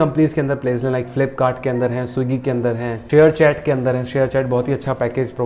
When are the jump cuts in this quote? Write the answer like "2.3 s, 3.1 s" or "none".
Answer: none